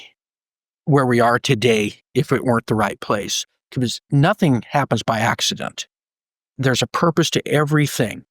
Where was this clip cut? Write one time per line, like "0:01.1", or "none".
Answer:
0:04.1
0:06.6